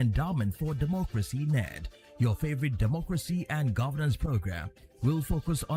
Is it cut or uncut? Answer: uncut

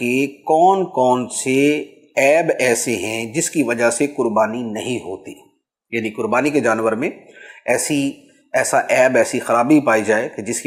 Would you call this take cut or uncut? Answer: uncut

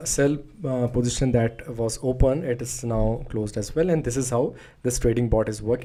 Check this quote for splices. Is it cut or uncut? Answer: uncut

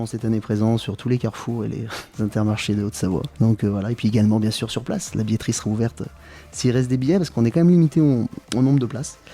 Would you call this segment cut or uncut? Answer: cut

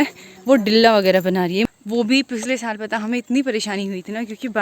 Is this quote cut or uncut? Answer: cut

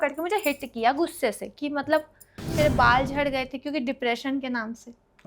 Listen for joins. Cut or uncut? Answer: cut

